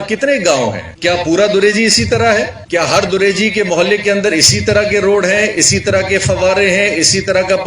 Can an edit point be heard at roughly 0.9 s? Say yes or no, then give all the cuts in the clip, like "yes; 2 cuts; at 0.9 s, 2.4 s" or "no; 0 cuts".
yes; 2 cuts; at 0.9 s, 2.6 s